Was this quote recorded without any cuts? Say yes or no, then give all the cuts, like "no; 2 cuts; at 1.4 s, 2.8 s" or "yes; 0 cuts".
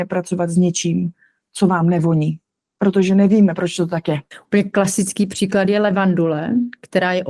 no; 1 cut; at 4.3 s